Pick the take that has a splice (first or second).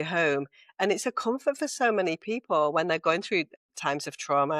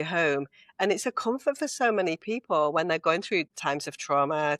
second